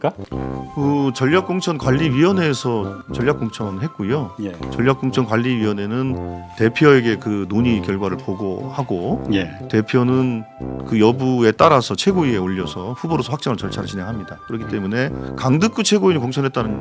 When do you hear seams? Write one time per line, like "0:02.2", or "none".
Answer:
none

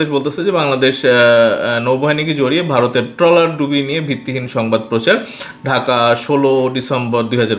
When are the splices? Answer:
none

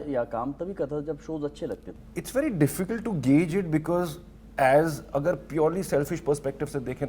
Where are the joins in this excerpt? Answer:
0:01.9

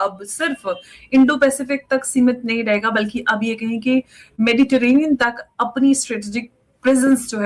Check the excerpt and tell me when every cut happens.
none

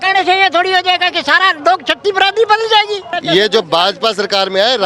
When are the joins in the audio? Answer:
0:03.1

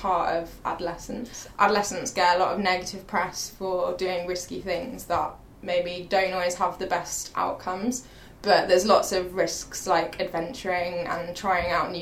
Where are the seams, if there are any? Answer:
0:01.3

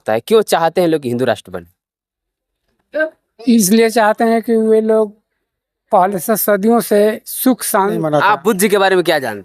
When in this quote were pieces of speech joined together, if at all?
0:08.0

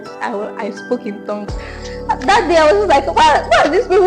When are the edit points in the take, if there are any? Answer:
0:01.8

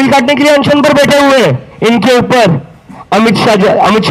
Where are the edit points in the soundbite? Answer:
0:01.7

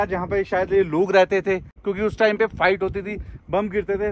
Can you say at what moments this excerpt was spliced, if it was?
0:01.8

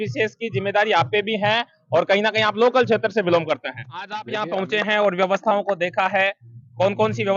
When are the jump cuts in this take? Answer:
0:04.2

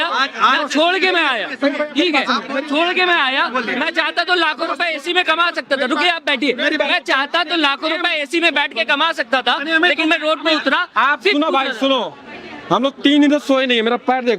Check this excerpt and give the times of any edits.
none

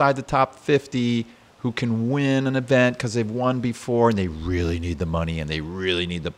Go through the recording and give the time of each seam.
none

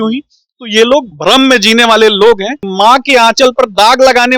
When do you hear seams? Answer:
0:02.6

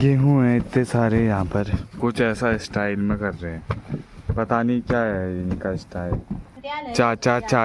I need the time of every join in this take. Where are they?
0:01.9
0:06.5

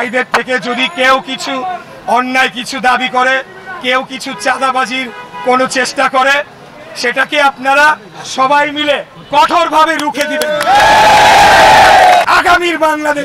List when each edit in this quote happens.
0:12.3

